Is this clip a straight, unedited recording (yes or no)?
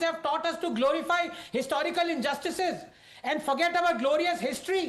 yes